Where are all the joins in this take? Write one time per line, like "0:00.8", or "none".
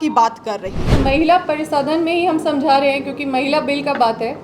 0:01.0